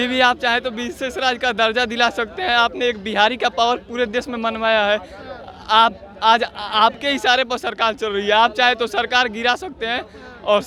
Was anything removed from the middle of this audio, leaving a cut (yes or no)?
no